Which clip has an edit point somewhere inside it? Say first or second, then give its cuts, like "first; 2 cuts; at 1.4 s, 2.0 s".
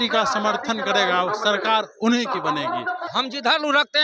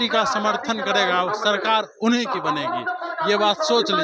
first; 1 cut; at 3.0 s